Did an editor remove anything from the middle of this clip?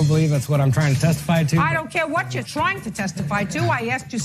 no; 0 cuts

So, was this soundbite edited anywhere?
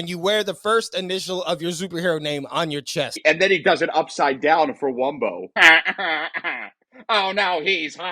yes; 2 cuts; at 3.2 s, 5.5 s

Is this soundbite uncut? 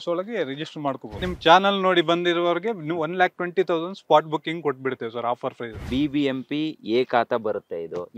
no; 2 cuts; at 1.3 s, 5.8 s

